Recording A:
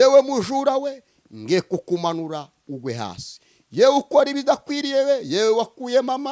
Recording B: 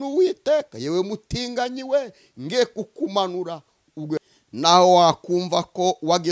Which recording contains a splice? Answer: B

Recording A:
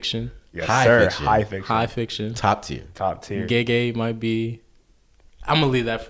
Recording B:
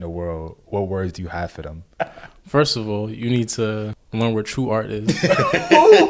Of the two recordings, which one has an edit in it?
B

